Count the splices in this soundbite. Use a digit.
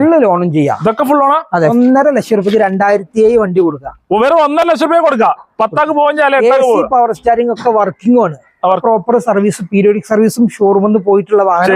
2